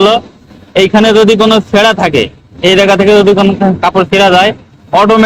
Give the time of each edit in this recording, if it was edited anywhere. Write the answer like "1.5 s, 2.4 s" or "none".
none

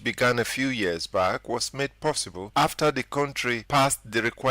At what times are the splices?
2.3 s, 3.6 s

